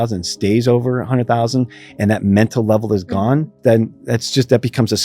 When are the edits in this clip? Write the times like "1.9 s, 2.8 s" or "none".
3.5 s